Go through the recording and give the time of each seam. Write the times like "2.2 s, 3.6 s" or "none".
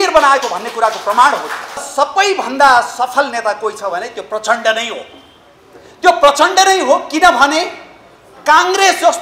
1.9 s